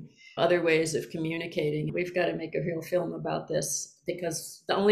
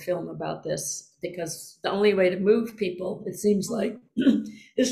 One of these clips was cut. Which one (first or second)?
first